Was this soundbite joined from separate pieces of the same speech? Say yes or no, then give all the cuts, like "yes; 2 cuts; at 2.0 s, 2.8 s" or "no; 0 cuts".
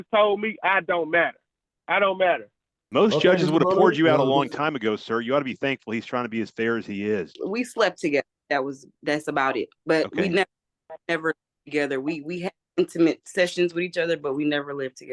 yes; 2 cuts; at 7.4 s, 9.7 s